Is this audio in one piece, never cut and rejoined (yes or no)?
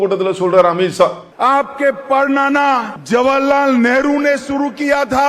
no